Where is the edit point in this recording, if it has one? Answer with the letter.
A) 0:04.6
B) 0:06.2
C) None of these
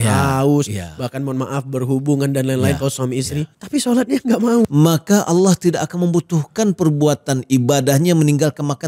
A